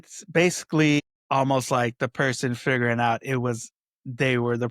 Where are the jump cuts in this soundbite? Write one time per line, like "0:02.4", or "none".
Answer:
0:01.2